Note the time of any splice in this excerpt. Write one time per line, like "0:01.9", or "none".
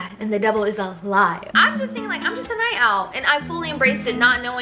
0:01.4